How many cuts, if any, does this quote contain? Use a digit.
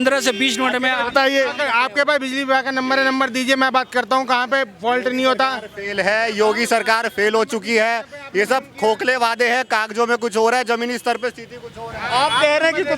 0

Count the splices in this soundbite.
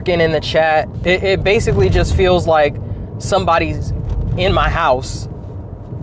1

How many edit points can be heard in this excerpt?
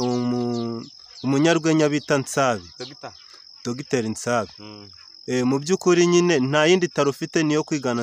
0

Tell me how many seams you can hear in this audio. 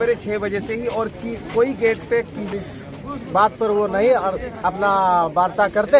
1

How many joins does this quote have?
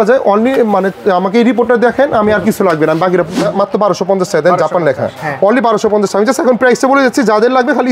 1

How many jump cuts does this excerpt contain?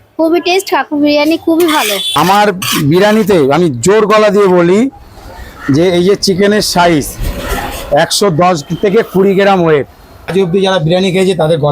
2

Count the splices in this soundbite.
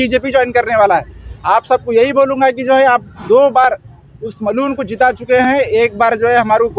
0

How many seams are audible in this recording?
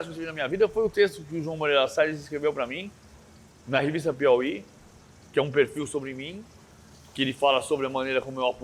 0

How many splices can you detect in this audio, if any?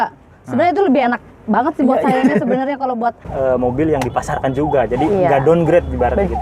1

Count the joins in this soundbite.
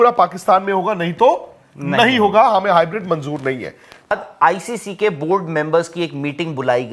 1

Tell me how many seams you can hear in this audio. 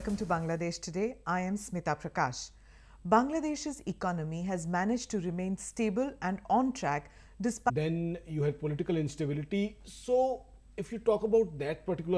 0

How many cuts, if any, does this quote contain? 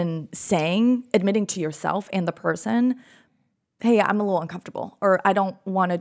0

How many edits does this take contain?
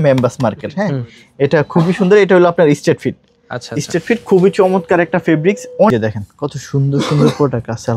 1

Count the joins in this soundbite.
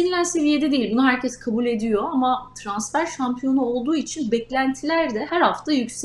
0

